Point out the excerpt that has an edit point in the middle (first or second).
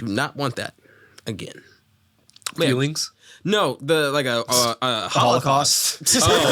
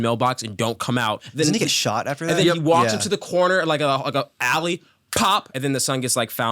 second